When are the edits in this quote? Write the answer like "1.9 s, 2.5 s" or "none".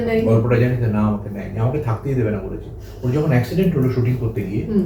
none